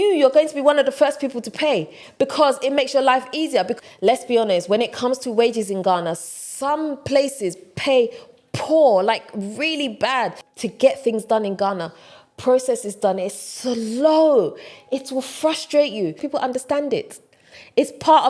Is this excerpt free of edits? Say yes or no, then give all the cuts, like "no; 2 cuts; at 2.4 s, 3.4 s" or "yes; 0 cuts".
no; 3 cuts; at 3.7 s, 10.5 s, 16.2 s